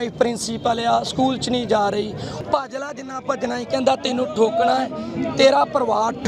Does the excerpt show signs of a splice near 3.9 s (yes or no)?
no